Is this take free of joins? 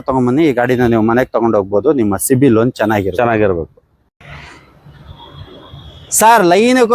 yes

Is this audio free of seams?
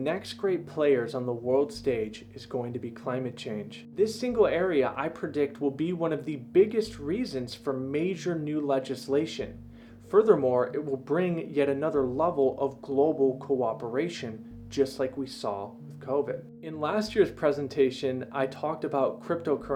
yes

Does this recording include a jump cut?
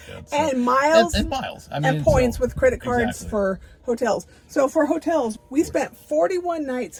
no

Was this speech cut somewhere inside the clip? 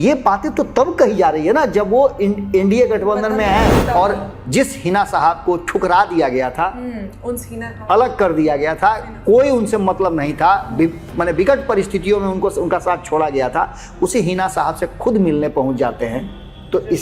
yes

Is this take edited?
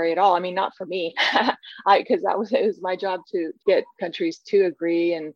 yes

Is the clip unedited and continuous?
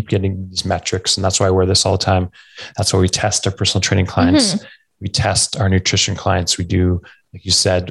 yes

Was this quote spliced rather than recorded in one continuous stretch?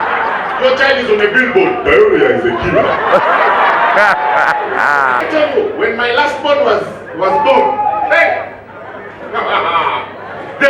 yes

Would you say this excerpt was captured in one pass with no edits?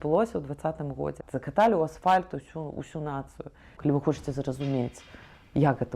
no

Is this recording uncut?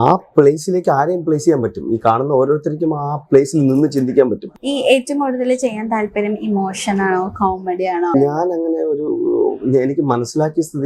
no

